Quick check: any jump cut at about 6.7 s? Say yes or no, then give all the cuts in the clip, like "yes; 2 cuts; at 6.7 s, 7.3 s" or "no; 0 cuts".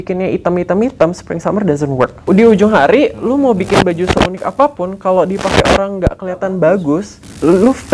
no; 1 cut; at 2.2 s